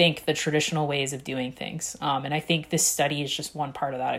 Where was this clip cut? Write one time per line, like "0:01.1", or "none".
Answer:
none